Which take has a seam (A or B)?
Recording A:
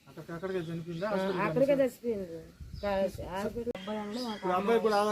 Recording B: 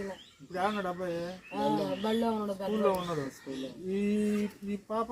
A